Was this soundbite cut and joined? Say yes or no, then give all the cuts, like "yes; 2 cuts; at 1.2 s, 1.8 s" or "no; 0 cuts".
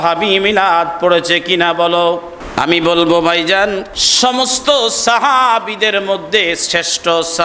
yes; 2 cuts; at 2.4 s, 4.0 s